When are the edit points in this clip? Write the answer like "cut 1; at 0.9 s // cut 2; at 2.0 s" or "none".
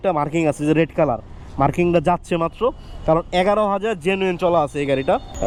none